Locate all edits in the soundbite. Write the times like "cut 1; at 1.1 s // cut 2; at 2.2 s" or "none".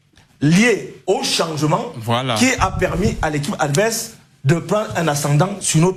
none